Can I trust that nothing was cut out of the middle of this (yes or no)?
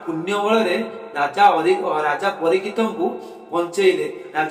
yes